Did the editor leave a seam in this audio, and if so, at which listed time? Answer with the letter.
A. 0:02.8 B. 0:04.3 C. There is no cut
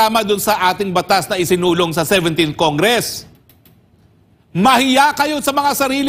C